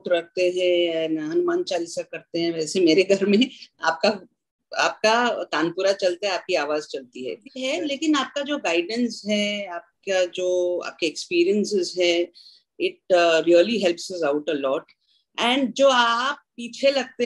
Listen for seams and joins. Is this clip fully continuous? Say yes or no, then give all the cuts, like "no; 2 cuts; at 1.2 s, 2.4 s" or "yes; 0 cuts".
no; 1 cut; at 7.5 s